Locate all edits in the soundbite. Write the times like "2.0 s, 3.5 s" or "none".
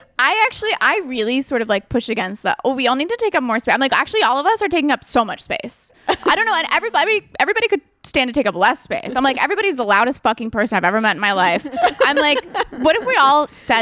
none

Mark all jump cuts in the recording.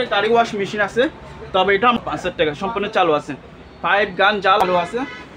2.0 s, 4.6 s

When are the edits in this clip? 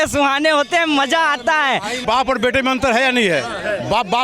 2.0 s

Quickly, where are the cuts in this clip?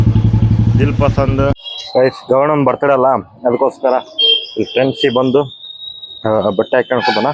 1.7 s

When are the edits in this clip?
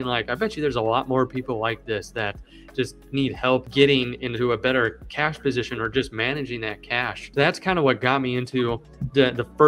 3.7 s, 7.2 s

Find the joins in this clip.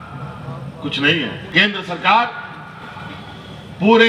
1.5 s

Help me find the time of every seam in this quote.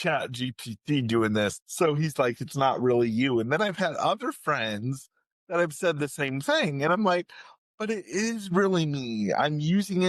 1.6 s

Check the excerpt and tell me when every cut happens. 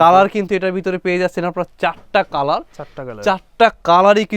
none

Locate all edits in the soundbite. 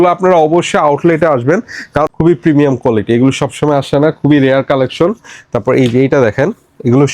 2.1 s

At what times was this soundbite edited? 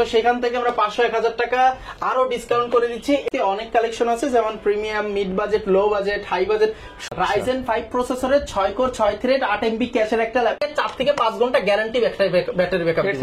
3.2 s, 7.0 s, 10.6 s

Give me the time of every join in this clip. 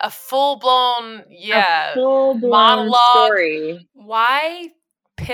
3.9 s

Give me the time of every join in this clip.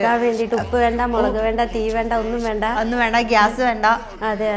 none

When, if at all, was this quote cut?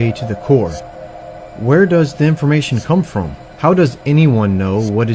4.0 s

